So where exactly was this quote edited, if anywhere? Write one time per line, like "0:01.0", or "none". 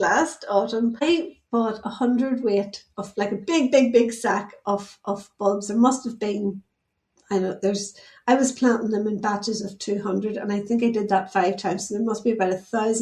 0:01.0